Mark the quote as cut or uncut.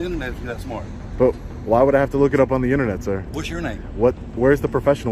uncut